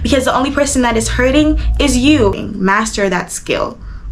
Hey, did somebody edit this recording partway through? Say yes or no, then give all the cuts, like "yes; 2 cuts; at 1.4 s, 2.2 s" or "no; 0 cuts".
yes; 1 cut; at 2.5 s